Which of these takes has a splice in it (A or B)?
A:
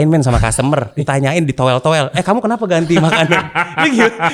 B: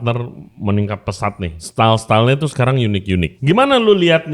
B